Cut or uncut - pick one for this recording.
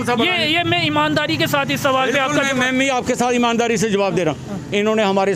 uncut